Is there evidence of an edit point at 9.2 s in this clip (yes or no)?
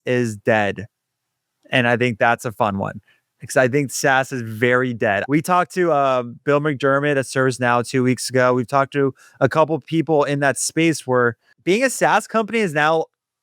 no